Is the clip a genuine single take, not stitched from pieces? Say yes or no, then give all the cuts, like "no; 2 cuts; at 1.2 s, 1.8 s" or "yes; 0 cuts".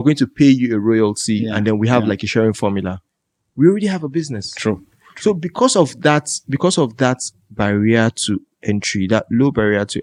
yes; 0 cuts